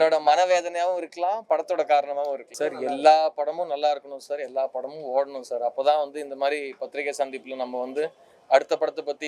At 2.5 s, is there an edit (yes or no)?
yes